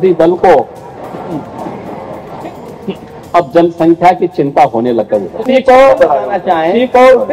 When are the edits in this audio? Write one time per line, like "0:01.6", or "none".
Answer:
0:05.4